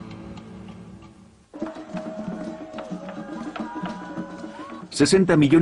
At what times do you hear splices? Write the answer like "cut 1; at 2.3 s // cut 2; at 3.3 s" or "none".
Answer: cut 1; at 4.2 s

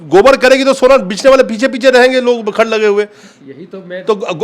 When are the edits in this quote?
none

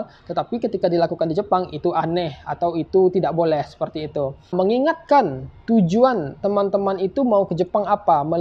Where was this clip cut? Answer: cut 1; at 4.5 s

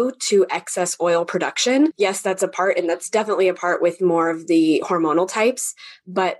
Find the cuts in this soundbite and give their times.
cut 1; at 1.9 s

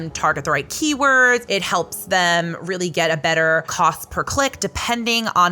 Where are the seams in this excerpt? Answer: cut 1; at 1.4 s // cut 2; at 3.7 s

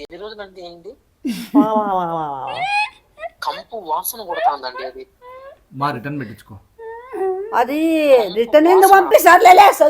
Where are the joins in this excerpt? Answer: cut 1; at 1.0 s // cut 2; at 3.1 s

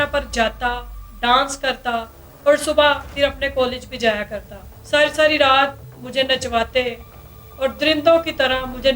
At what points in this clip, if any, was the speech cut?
cut 1; at 4.7 s

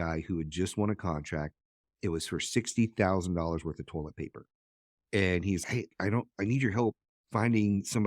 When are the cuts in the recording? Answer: none

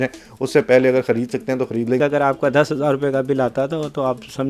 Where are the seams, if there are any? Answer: cut 1; at 2.0 s

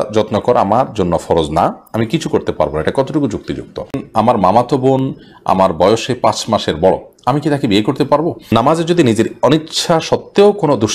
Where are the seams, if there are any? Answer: cut 1; at 4.0 s // cut 2; at 8.4 s

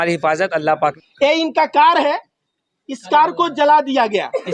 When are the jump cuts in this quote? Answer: cut 1; at 1.0 s

